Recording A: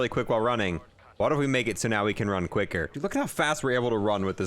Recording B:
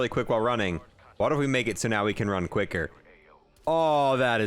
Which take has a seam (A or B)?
A